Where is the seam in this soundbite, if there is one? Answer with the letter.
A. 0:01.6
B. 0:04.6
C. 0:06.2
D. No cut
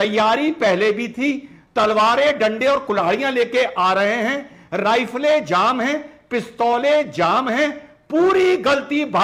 D